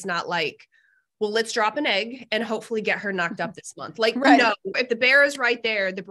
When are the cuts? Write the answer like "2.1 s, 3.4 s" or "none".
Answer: 4.7 s